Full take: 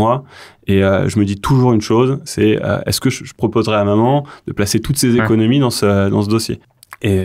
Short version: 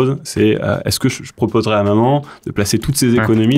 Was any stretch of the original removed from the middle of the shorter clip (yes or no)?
no